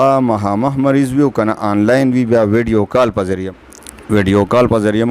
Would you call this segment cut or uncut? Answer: uncut